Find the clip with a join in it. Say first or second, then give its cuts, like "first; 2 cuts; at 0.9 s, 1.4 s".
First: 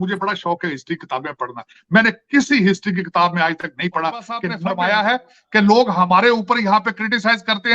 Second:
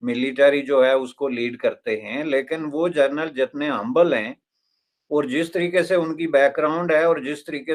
first; 1 cut; at 4.5 s